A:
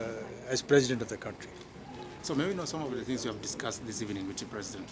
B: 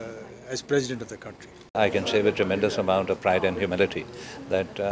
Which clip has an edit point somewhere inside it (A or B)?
B